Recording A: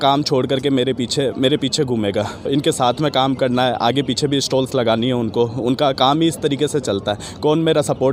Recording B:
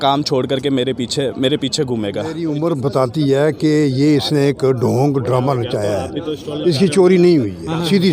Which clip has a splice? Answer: B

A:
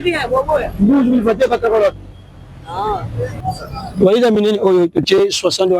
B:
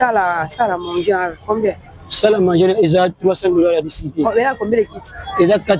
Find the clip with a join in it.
A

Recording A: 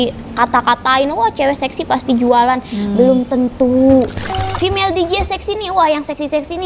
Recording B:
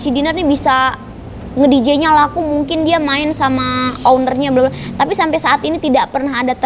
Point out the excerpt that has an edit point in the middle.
A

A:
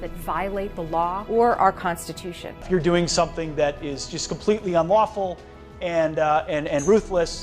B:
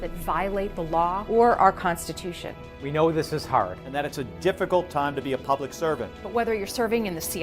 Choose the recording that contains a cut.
B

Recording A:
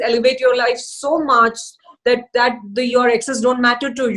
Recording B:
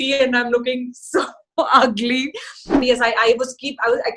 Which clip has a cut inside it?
B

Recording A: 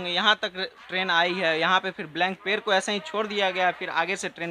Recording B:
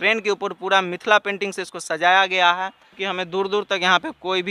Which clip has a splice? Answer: B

